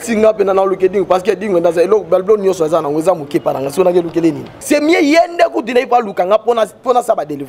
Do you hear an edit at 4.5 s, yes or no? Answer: yes